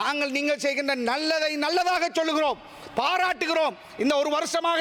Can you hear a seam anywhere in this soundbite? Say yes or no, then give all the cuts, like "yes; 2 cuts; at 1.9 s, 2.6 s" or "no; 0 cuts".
no; 0 cuts